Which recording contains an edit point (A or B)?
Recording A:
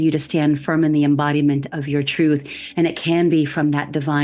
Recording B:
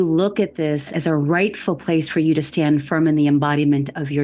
B